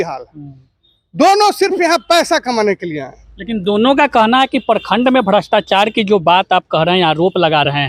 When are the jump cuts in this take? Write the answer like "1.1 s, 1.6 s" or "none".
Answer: none